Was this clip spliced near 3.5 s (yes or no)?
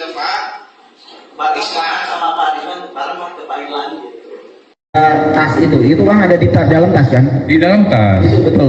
no